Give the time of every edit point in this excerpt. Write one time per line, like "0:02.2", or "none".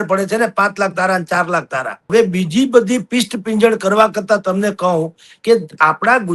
0:02.1